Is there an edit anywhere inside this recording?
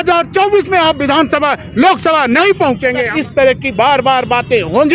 yes; 1 cut; at 3.1 s

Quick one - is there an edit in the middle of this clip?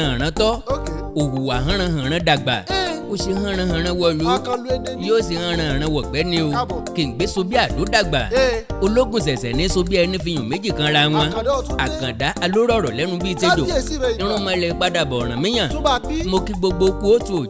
no; 0 cuts

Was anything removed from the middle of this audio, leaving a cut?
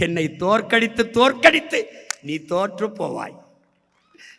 no; 0 cuts

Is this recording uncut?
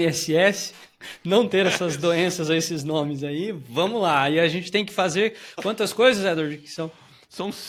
yes; 0 cuts

